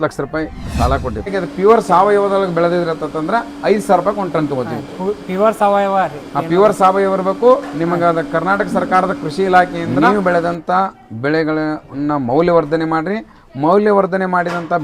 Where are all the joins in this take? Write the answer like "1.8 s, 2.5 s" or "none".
1.3 s, 9.9 s